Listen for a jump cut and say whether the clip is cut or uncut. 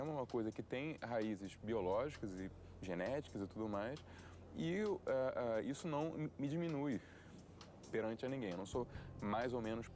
uncut